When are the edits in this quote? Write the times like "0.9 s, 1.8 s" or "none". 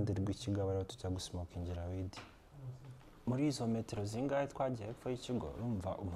none